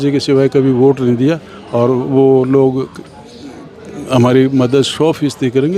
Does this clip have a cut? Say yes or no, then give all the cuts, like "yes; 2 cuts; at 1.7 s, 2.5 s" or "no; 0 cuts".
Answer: no; 0 cuts